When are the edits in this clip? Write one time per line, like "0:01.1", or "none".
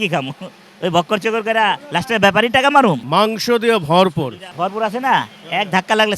0:03.0
0:04.4

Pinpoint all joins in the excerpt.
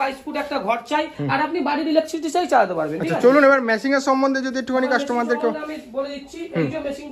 none

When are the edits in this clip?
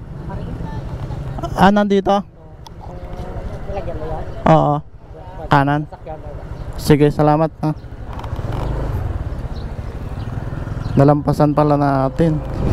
none

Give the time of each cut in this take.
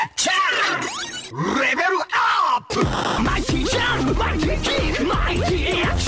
0:02.9

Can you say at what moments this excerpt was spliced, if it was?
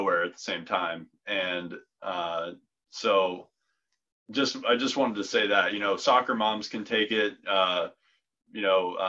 none

